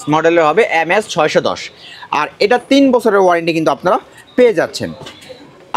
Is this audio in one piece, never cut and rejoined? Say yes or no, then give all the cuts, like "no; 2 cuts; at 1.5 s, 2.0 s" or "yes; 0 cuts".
yes; 0 cuts